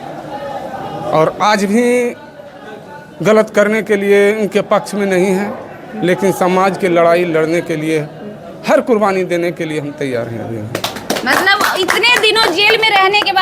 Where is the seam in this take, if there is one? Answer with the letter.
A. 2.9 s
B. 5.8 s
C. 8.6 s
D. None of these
D